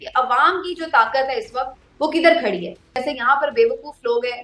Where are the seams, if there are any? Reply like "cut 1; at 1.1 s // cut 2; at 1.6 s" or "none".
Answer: cut 1; at 3.0 s